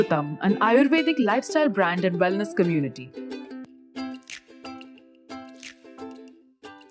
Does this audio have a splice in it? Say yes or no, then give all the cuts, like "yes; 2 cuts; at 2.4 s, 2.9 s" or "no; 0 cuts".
yes; 1 cut; at 2.9 s